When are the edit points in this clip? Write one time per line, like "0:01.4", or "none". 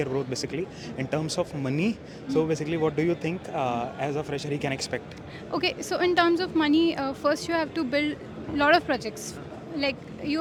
none